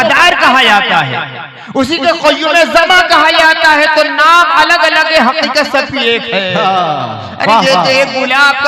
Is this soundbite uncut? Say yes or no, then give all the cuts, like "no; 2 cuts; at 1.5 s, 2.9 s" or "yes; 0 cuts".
yes; 0 cuts